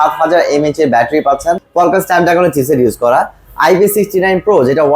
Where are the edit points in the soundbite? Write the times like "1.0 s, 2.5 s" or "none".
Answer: 1.6 s